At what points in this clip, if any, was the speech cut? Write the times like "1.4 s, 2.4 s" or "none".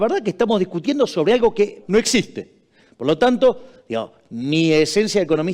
1.8 s